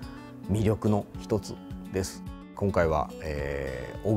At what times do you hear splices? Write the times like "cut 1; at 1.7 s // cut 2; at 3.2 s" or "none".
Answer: cut 1; at 2.4 s